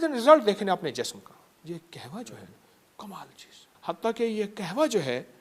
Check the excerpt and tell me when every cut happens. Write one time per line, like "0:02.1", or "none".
0:01.6
0:03.7